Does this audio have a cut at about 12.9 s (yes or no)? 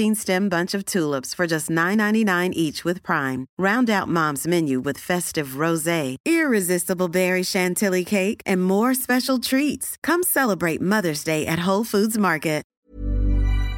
yes